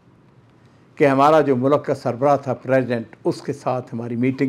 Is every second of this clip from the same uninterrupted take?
yes; 0 cuts

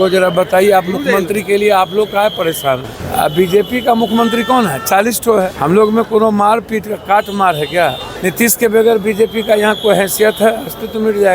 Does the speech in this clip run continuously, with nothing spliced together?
no; 3 cuts; at 3.0 s, 5.5 s, 8.1 s

